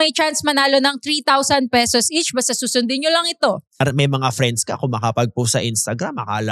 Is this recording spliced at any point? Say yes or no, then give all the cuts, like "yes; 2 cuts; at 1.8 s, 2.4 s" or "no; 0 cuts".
yes; 1 cut; at 3.8 s